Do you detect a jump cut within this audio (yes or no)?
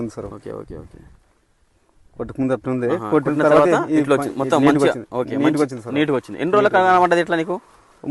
no